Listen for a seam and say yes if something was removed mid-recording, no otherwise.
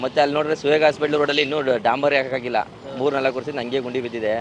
no